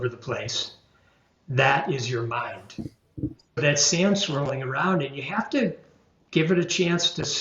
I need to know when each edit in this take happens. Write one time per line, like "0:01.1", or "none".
0:03.6

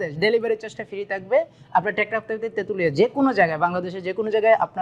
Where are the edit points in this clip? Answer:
none

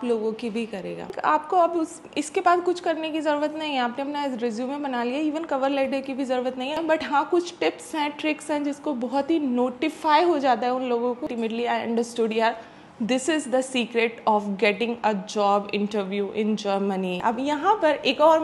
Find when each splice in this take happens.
0:01.1
0:06.8
0:11.3
0:17.2

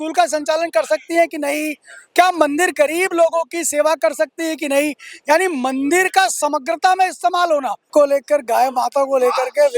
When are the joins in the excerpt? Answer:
0:07.9

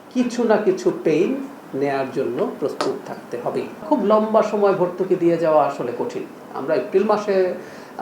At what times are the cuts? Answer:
0:03.8

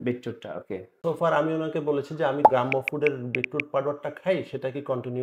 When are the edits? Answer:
0:01.0
0:02.5

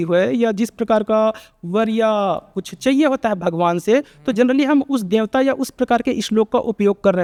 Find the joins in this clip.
none

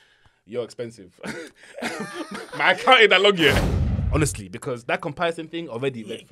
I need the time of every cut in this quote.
0:03.8

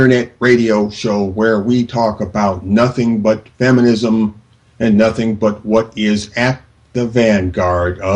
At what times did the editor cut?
none

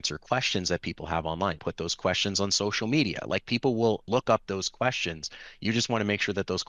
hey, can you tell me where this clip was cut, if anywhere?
0:01.6
0:04.0

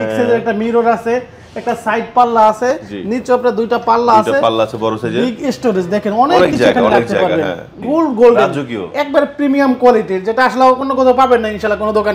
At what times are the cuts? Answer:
0:07.8

